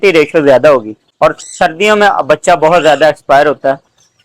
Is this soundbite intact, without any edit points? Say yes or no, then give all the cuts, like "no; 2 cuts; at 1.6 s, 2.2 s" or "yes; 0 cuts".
no; 1 cut; at 1.0 s